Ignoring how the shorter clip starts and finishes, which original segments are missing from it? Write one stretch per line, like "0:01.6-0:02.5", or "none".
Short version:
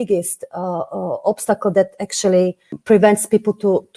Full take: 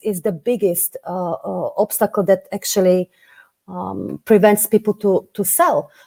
0:03.2-0:04.1